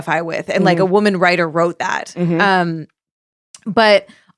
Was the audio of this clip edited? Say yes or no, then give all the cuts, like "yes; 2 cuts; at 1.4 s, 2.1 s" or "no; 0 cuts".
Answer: no; 0 cuts